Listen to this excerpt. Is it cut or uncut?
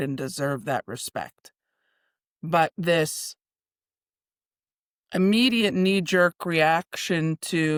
uncut